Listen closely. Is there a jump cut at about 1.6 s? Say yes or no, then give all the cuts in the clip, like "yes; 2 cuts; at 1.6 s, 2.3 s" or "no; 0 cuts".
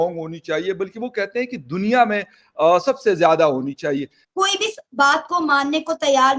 no; 1 cut; at 4.2 s